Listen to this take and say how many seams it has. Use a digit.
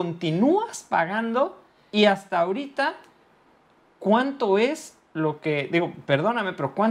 1